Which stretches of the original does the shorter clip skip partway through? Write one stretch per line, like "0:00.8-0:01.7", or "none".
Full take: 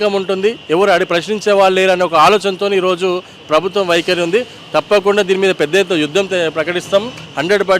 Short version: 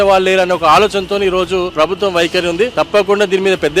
0:03.2-0:03.4
0:04.5-0:04.7